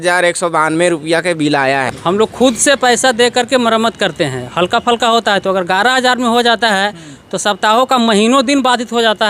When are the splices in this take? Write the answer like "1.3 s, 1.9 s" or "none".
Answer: 1.9 s

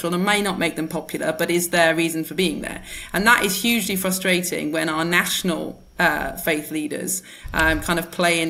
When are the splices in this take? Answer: none

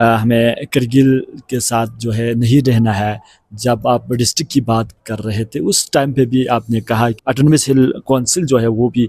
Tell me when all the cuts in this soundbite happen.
none

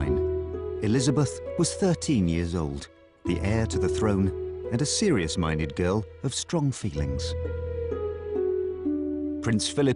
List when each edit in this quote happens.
1.5 s

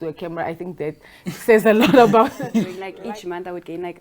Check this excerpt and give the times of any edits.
2.8 s

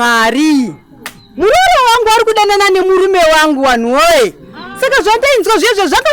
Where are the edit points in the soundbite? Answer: none

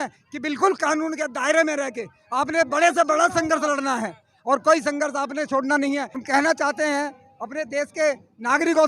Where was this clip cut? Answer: 6.2 s

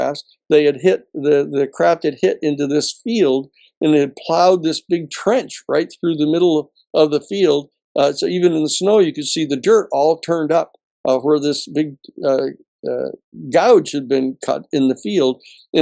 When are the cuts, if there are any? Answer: none

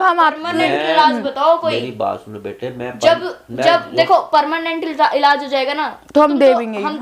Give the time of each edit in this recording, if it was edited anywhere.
none

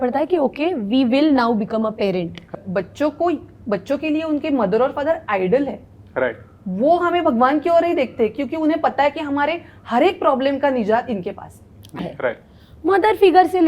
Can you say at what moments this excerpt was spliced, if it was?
2.5 s, 12.0 s

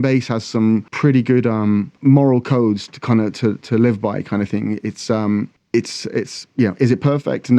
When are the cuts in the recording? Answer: 0.9 s, 1.9 s

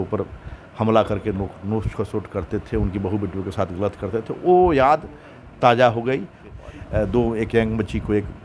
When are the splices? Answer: 6.5 s

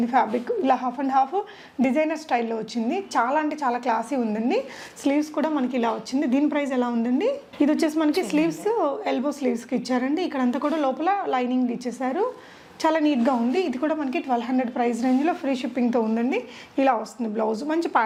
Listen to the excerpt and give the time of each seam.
none

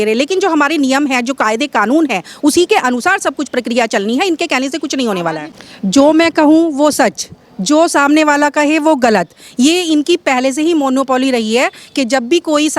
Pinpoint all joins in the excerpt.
5.5 s

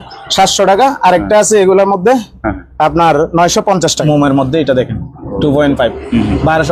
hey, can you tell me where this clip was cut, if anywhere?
4.0 s

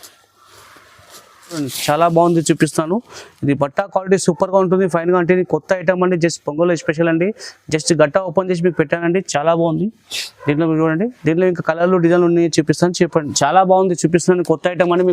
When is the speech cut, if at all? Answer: 1.7 s, 13.3 s

